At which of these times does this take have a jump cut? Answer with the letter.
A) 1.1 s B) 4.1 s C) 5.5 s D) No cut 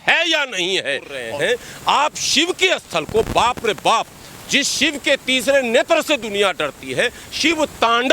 A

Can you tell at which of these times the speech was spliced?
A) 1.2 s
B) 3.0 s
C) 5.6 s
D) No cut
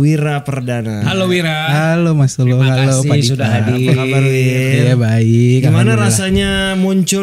D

